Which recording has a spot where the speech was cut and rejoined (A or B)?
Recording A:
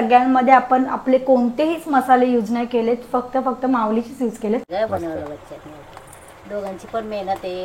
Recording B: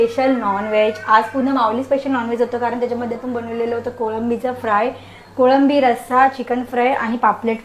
A